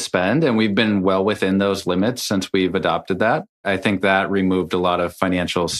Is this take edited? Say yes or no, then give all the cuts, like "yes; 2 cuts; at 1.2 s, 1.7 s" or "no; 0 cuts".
yes; 1 cut; at 3.6 s